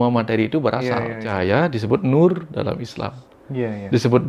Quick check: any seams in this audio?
yes; 1 cut; at 1.4 s

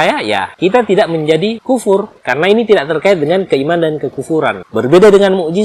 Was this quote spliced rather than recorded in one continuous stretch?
no; 0 cuts

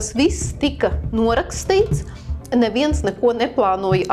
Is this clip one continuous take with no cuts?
yes; 0 cuts

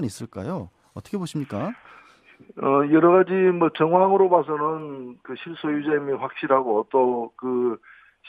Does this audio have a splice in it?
yes; 1 cut; at 3.4 s

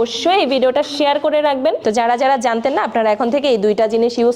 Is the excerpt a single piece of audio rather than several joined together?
no; 1 cut; at 1.8 s

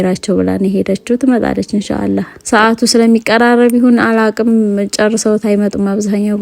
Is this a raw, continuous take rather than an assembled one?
no; 1 cut; at 2.3 s

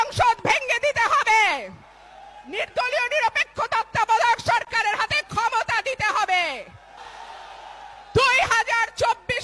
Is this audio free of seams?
no; 1 cut; at 7.0 s

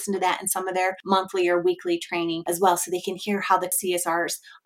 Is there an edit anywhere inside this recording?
yes; 3 cuts; at 1.0 s, 2.4 s, 3.8 s

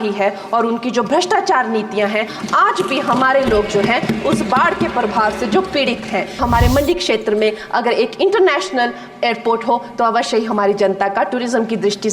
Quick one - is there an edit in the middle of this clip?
yes; 1 cut; at 6.4 s

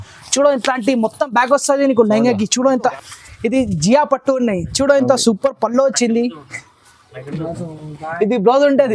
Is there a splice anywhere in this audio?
yes; 1 cut; at 2.9 s

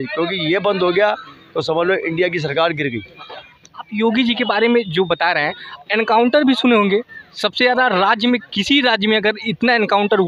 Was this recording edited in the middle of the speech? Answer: no; 0 cuts

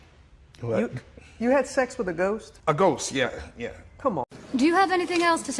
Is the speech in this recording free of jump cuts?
no; 1 cut; at 4.3 s

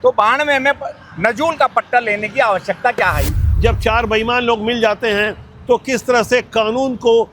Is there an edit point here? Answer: yes; 1 cut; at 3.4 s

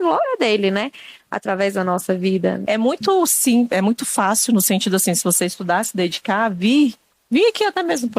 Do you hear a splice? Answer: yes; 1 cut; at 2.6 s

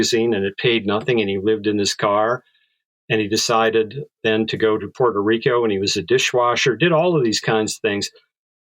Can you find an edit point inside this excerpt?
no; 0 cuts

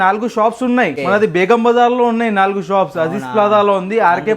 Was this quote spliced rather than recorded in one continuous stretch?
yes; 1 cut; at 1.0 s

